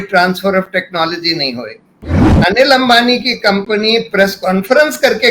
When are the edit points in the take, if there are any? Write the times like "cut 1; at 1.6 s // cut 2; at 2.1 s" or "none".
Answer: cut 1; at 2.3 s